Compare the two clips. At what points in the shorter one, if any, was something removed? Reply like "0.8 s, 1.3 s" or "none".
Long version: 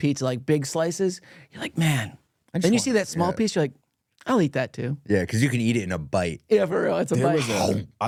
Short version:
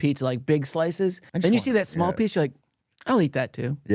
1.2 s